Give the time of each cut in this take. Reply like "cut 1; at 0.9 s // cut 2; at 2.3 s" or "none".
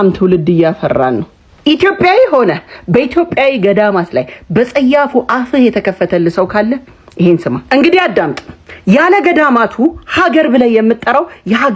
none